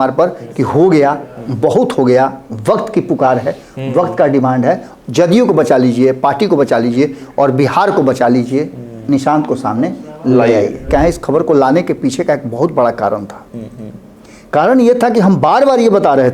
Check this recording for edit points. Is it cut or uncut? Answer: cut